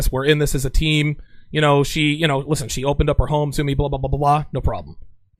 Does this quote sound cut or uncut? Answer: uncut